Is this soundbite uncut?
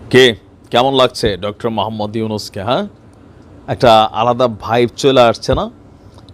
yes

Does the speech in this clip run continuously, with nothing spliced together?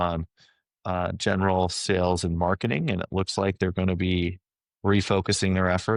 yes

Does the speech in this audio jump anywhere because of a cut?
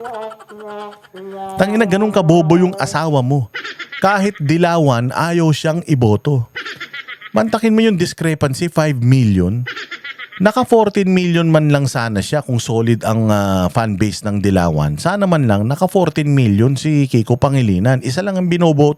no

